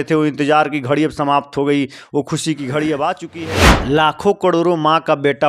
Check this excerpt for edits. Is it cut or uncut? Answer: cut